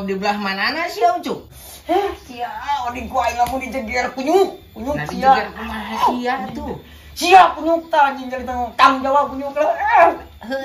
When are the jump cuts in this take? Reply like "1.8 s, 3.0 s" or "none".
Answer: 1.5 s